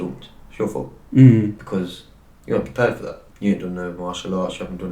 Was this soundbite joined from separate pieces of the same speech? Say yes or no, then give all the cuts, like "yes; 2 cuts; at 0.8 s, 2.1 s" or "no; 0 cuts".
yes; 2 cuts; at 1.6 s, 3.2 s